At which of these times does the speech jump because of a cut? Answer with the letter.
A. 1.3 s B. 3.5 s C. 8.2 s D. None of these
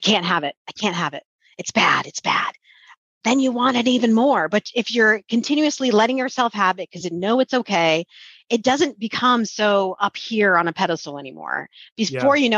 D